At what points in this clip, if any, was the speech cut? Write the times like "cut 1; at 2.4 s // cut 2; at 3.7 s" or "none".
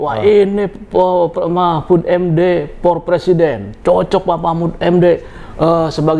none